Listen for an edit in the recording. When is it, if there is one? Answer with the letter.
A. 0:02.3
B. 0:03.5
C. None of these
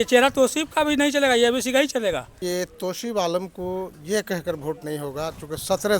A